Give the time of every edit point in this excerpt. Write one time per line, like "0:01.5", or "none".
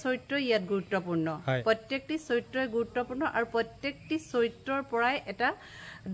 none